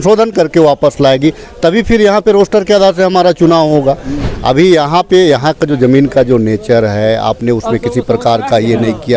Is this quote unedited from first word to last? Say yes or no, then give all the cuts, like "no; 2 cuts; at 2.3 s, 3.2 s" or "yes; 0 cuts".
no; 1 cut; at 4.2 s